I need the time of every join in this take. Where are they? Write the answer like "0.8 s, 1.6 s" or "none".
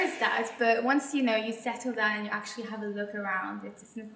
none